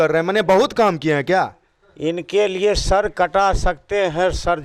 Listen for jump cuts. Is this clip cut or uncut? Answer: uncut